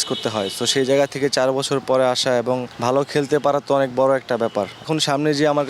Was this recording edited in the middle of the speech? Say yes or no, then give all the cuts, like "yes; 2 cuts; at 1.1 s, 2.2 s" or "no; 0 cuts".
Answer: yes; 2 cuts; at 2.7 s, 4.8 s